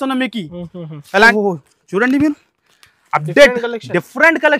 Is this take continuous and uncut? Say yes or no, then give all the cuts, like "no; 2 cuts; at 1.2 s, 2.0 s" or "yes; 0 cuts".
no; 1 cut; at 1.3 s